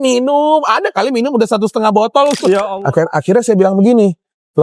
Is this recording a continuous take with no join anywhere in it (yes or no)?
no